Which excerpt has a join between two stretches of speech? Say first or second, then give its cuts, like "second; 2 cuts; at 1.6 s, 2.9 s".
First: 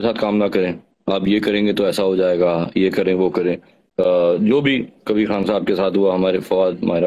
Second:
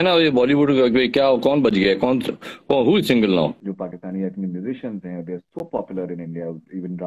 second; 1 cut; at 3.6 s